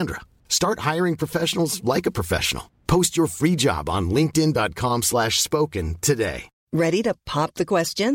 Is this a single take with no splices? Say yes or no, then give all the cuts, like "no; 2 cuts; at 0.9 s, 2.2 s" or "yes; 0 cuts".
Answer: no; 1 cut; at 6.5 s